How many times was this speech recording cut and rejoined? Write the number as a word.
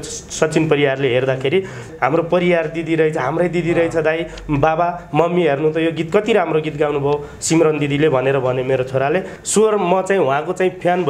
two